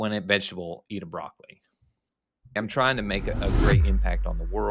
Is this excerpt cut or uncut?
cut